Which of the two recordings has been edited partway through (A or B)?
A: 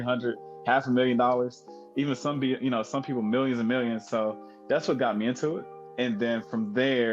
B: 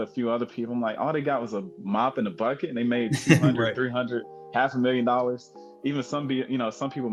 A